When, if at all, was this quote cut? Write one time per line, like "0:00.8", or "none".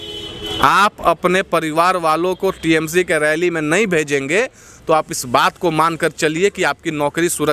none